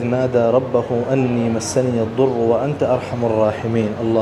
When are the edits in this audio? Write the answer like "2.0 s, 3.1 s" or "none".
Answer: none